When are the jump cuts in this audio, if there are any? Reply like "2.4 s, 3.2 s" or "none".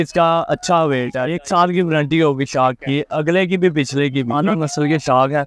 1.2 s, 4.6 s